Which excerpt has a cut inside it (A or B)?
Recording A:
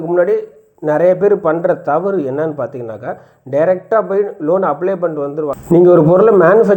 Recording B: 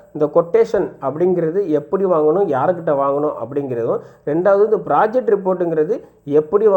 A